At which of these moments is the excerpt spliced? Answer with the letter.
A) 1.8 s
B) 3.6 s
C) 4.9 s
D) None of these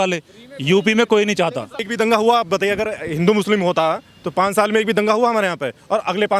A